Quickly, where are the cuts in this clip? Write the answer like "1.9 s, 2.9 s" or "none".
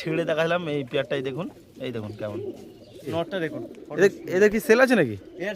3.1 s